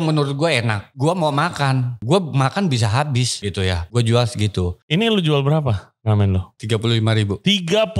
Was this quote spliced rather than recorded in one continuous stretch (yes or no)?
yes